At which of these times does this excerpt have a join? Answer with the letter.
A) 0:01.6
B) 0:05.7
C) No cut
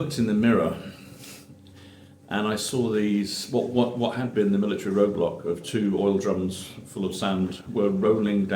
C